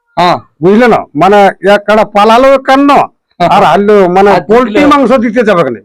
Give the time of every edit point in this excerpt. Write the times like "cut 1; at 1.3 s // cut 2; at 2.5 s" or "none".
none